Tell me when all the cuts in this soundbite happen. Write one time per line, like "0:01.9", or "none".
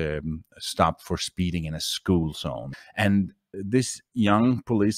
0:02.7
0:03.5